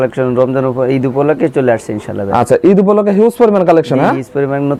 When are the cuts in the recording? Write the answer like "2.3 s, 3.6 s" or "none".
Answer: none